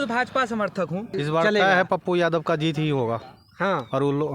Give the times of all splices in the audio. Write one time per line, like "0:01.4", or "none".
0:01.2